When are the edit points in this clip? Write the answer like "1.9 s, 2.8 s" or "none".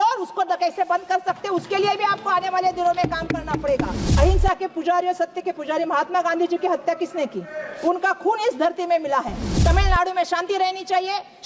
4.0 s, 9.5 s

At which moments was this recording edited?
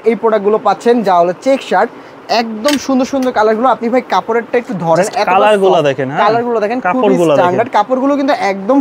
none

